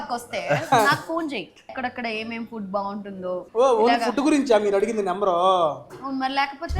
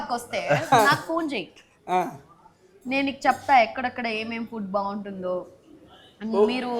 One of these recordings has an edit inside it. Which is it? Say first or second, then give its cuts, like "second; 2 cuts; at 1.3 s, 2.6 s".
first; 2 cuts; at 1.7 s, 3.4 s